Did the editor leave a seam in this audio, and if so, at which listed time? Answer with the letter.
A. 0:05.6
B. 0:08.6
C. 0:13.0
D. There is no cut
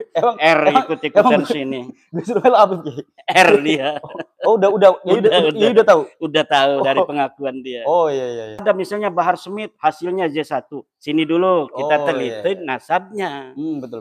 B